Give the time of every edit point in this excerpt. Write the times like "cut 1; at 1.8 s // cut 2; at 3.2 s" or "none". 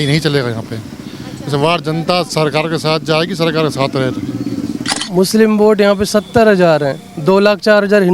cut 1; at 5.0 s